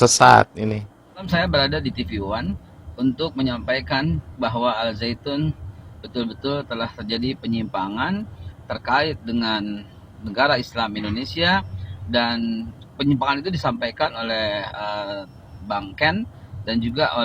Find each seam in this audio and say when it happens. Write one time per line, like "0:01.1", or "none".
0:01.2